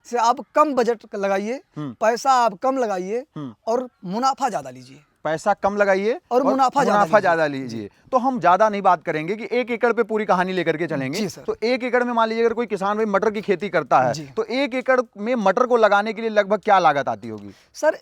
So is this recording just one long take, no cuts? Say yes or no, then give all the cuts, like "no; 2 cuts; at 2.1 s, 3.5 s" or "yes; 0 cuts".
yes; 0 cuts